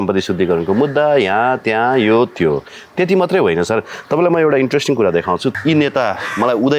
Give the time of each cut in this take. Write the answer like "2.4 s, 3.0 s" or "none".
5.5 s